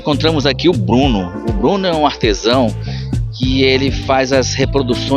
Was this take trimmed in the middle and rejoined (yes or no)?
no